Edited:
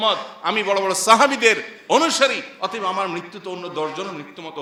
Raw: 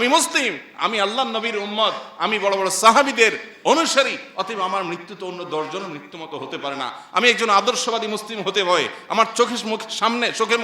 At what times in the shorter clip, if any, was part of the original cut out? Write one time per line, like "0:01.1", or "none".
none